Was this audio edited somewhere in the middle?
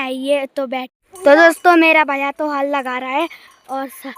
yes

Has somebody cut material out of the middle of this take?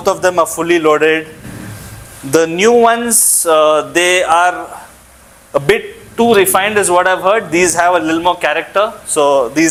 no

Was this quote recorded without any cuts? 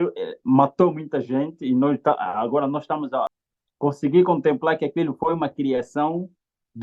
no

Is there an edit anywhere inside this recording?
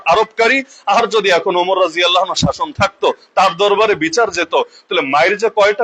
no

